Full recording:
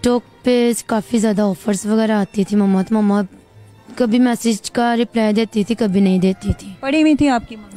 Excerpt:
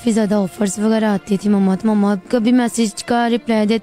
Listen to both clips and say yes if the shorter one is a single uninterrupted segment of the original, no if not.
no